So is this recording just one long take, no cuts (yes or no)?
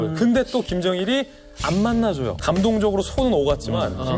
no